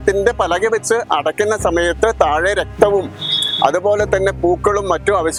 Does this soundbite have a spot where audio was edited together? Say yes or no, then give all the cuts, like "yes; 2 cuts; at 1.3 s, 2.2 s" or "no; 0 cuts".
no; 0 cuts